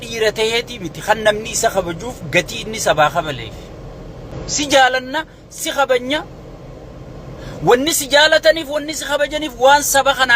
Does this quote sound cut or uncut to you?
cut